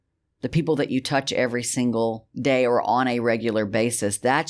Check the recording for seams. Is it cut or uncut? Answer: cut